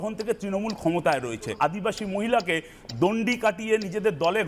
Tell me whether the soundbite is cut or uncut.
cut